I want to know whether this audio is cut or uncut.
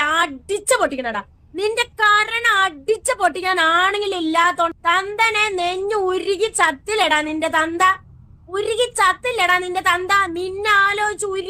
uncut